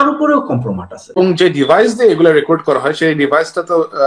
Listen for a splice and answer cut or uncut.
cut